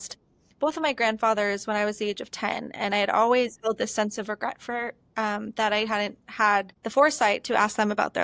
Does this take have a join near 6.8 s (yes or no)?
yes